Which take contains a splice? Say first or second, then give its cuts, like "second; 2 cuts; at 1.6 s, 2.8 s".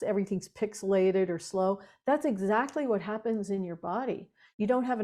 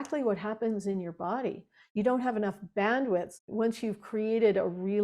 second; 1 cut; at 3.3 s